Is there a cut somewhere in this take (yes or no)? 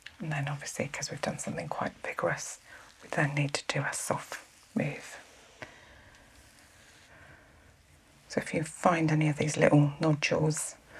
yes